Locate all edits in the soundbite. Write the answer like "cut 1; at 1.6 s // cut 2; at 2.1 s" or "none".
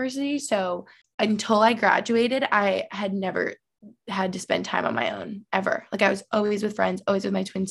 cut 1; at 1.0 s